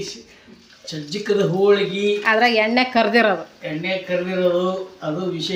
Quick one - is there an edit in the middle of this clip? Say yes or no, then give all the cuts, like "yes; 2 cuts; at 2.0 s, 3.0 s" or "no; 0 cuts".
no; 0 cuts